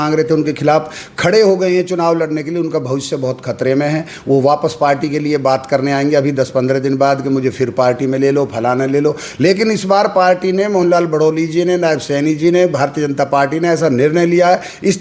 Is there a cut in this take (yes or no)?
no